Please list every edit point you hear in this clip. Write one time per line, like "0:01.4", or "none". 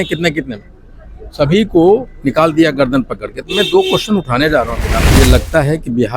0:05.0